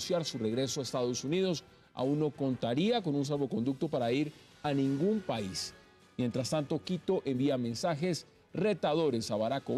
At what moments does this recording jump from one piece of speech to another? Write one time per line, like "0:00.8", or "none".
none